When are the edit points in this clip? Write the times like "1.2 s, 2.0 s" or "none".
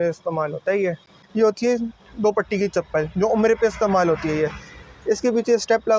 1.2 s